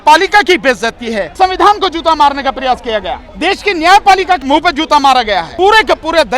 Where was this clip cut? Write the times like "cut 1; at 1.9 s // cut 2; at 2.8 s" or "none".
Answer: cut 1; at 1.3 s // cut 2; at 3.2 s // cut 3; at 4.4 s // cut 4; at 5.5 s